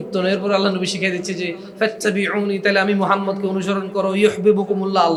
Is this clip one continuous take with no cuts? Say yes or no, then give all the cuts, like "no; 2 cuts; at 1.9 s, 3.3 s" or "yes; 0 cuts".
yes; 0 cuts